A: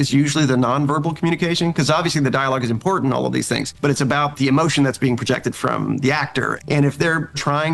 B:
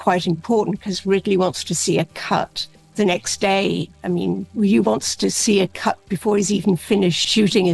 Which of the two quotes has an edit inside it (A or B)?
A